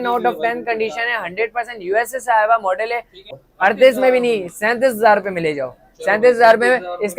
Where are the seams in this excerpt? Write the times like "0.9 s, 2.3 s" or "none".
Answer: 3.3 s

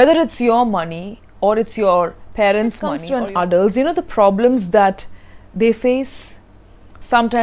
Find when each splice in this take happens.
3.0 s

